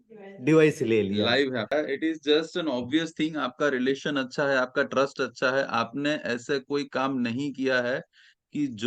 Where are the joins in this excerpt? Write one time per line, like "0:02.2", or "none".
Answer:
0:01.7

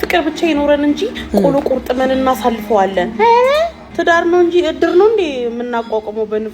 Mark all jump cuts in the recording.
0:03.8

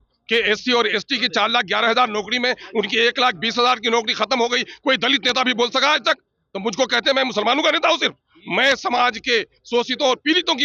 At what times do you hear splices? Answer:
none

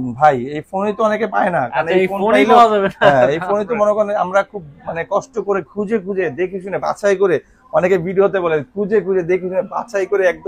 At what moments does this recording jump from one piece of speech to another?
none

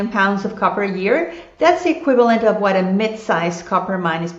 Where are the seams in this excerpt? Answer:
none

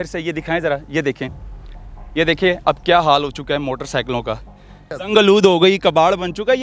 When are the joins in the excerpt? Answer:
0:05.0

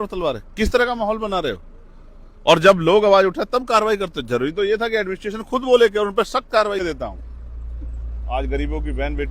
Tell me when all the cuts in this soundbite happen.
0:06.8

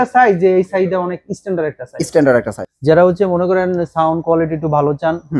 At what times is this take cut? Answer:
0:02.6

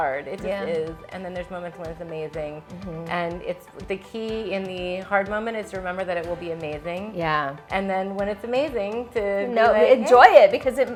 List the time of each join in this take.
none

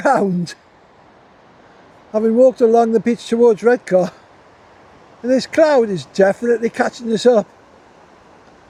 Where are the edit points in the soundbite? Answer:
none

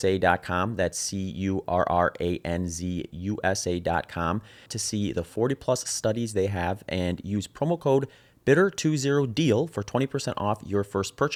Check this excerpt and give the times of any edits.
none

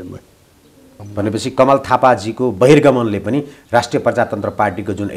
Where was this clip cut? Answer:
0:01.0

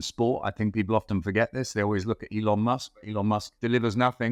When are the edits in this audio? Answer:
none

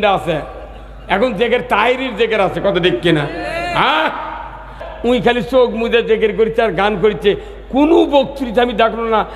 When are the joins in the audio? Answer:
0:04.8

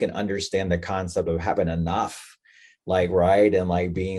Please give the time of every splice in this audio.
none

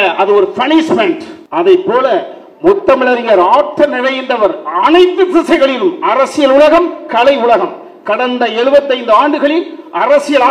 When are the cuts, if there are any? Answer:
0:01.3

